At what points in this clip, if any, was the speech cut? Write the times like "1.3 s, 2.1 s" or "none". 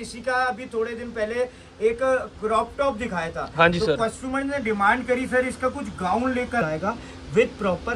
6.6 s